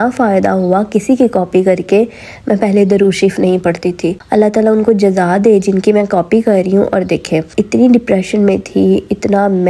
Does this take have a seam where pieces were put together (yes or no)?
no